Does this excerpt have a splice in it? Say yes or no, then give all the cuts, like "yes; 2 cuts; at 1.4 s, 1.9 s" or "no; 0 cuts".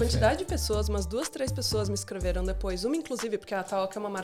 no; 0 cuts